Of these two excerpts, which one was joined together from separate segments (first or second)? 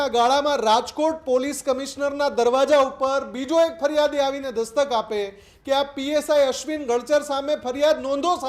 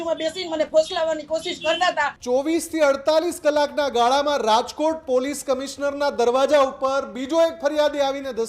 second